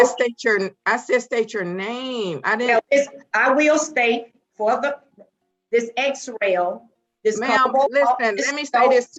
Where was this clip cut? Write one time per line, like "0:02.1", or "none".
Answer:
none